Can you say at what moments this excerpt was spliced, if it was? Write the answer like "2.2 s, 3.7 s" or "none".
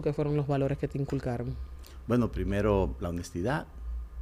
none